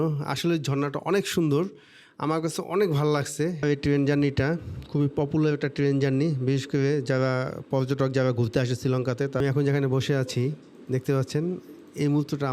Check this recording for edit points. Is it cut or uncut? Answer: cut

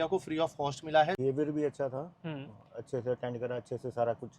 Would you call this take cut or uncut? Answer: cut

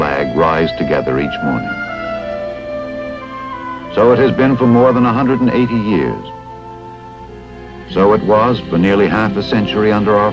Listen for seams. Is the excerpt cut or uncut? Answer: cut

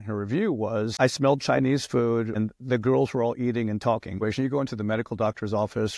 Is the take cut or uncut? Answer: cut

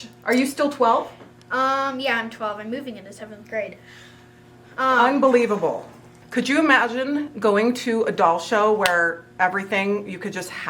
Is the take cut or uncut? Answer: cut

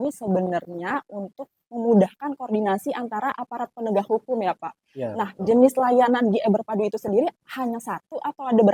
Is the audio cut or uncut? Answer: uncut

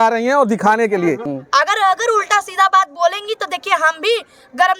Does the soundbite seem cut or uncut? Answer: cut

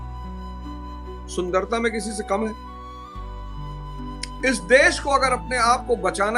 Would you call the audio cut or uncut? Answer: cut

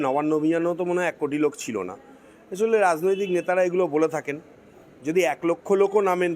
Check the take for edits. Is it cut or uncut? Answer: uncut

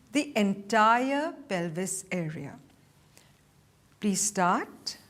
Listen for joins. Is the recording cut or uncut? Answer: cut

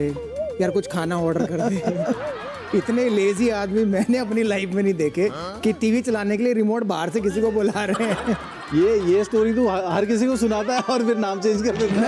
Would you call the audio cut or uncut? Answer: uncut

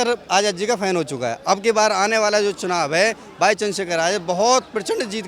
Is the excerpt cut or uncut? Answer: uncut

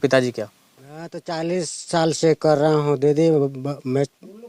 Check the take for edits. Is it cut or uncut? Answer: cut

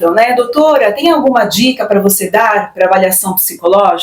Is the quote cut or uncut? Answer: uncut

